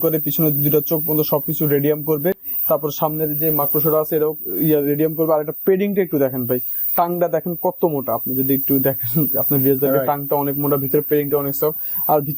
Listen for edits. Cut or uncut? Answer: uncut